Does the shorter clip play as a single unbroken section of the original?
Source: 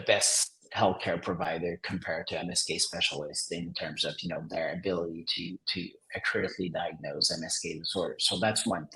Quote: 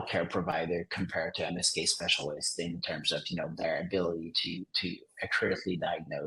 yes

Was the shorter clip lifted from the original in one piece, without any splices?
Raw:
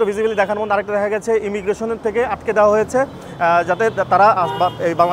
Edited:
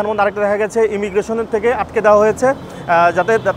yes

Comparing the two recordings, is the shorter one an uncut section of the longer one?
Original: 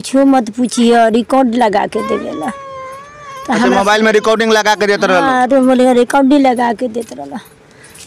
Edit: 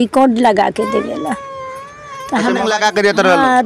no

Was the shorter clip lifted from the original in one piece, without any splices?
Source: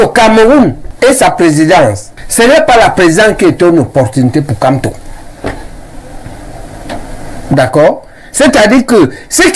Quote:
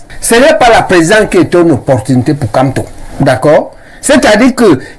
no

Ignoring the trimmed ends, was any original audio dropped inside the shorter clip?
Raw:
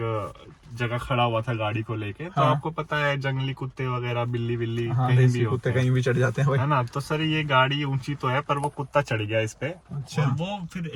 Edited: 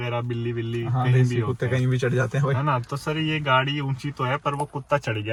no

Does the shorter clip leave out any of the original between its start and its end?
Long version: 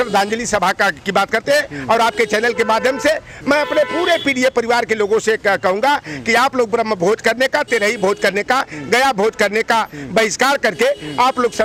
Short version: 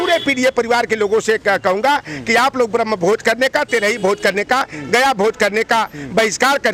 no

